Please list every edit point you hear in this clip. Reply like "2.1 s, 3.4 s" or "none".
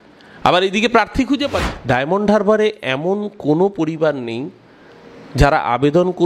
1.7 s